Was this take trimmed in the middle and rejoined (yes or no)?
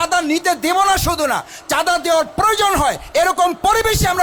no